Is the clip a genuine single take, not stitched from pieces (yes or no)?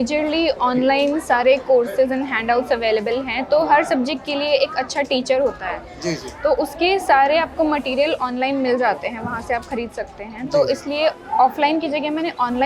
yes